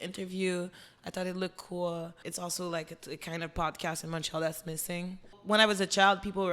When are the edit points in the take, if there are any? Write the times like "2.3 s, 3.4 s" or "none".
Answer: 2.2 s, 5.4 s